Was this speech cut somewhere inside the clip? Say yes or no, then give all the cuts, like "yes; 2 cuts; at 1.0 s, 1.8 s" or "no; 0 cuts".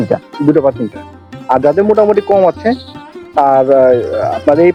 no; 0 cuts